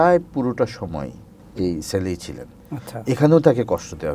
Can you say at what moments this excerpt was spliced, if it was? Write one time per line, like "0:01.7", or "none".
0:01.4